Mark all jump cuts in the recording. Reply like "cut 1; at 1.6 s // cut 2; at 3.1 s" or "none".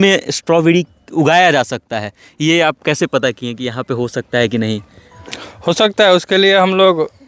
none